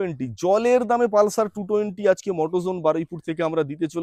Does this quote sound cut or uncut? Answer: uncut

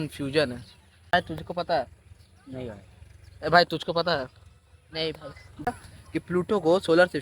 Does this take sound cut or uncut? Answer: cut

